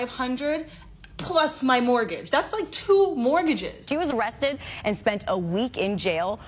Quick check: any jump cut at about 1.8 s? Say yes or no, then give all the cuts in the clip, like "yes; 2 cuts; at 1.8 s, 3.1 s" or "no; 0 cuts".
no; 1 cut; at 3.7 s